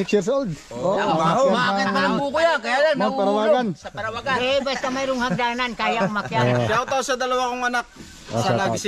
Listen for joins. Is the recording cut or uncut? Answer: uncut